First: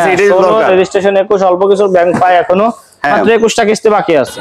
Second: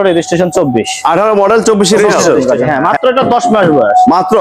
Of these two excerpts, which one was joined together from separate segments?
second; 1 cut; at 2.4 s

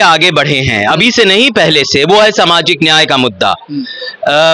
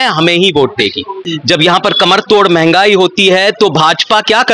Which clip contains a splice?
second; 1 cut; at 1.2 s

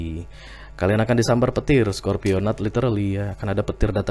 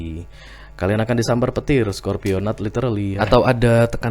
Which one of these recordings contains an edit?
second; 1 cut; at 3.1 s

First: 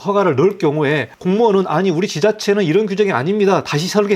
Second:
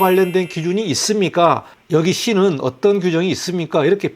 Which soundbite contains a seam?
first; 1 cut; at 1.1 s

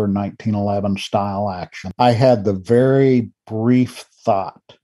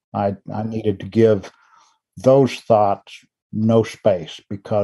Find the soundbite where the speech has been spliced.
first; 1 cut; at 1.8 s

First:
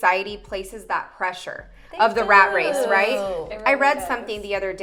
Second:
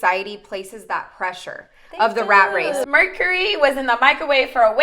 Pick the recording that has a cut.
second; 1 cut; at 2.9 s

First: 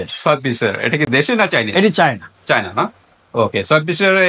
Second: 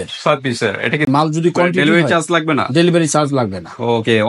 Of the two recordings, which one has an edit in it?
second; 1 cut; at 1.1 s

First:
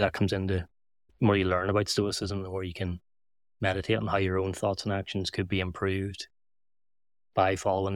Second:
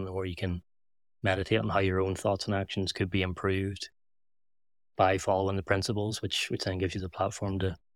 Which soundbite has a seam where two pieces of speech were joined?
first; 1 cut; at 1.1 s

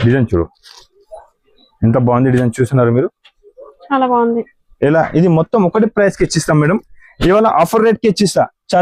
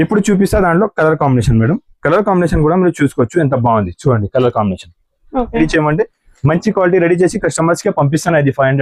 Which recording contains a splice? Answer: second; 1 cut; at 5.6 s

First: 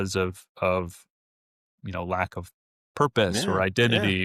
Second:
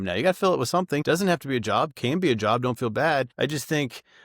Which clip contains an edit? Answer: second; 2 cuts; at 1.0 s, 3.3 s

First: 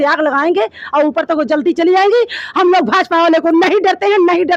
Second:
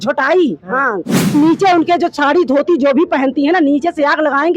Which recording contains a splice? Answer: second; 1 cut; at 1.3 s

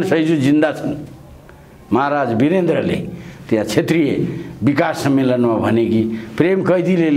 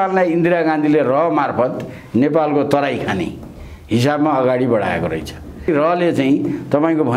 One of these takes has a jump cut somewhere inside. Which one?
second; 1 cut; at 5.7 s

